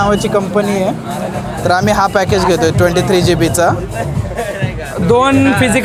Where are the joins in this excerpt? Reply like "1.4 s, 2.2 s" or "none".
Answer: none

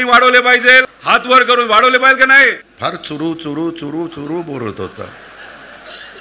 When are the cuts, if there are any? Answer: 0.9 s, 2.7 s

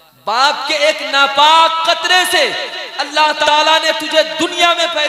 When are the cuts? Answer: 3.4 s

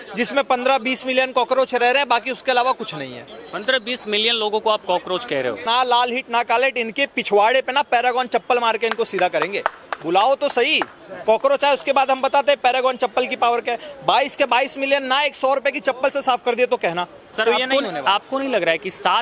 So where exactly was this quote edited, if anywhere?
5.6 s, 17.2 s

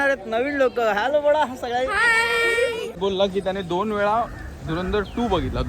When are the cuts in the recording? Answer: 2.9 s

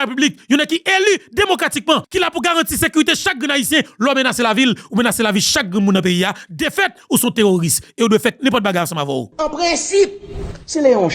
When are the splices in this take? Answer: 2.1 s, 9.3 s

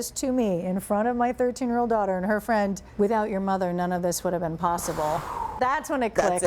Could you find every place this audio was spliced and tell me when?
5.5 s

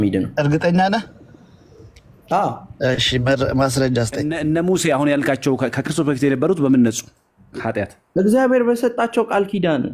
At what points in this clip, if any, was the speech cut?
4.3 s

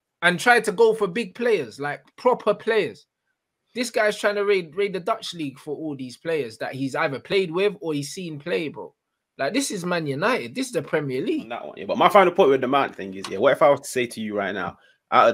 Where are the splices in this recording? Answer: 11.7 s

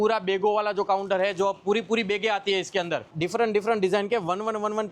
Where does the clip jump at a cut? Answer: 3.0 s

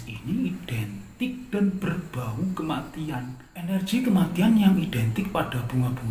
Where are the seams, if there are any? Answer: 3.7 s

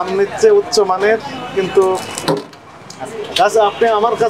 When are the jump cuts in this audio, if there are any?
none

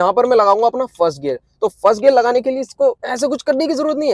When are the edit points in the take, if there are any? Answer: 3.1 s

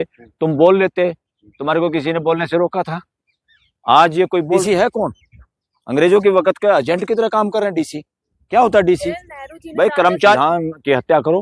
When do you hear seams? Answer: 4.6 s, 10.4 s

